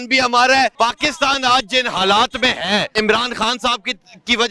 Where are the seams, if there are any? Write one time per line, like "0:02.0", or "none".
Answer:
0:00.7
0:02.9